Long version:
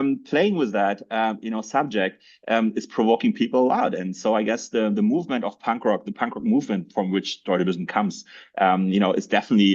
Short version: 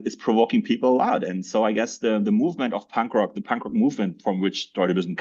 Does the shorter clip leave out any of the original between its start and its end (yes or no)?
no